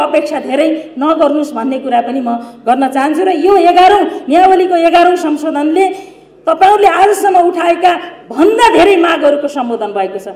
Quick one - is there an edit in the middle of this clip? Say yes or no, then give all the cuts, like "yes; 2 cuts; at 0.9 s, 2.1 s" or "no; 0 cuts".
no; 0 cuts